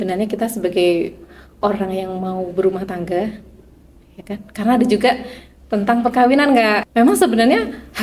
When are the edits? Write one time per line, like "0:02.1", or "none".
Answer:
0:06.8